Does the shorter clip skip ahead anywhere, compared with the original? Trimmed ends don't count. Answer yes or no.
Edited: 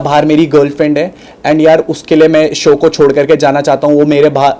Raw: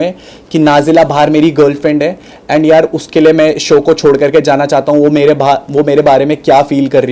no